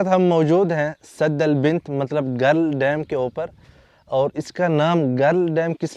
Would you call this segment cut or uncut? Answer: uncut